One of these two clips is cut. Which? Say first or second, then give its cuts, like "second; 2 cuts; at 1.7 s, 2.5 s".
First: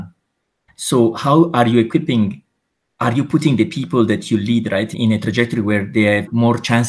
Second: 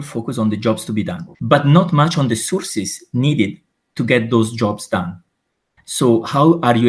second; 1 cut; at 1.2 s